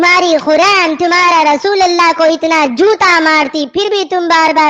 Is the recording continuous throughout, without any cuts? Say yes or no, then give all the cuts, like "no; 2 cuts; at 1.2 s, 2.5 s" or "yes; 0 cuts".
yes; 0 cuts